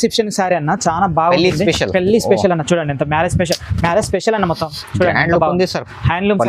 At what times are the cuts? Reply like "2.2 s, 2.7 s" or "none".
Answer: none